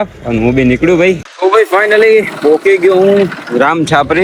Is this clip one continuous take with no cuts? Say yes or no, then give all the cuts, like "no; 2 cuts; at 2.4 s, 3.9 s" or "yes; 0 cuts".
no; 1 cut; at 1.3 s